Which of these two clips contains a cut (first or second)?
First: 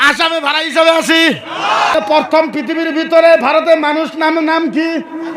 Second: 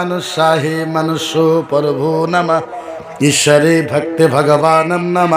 first